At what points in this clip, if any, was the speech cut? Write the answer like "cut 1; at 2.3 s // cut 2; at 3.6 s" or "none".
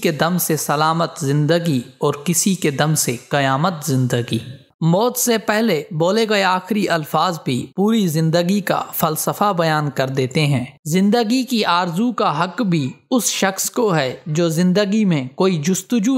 cut 1; at 4.7 s // cut 2; at 10.7 s